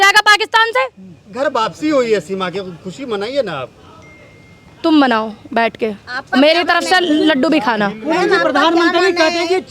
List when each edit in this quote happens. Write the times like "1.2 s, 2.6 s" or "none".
none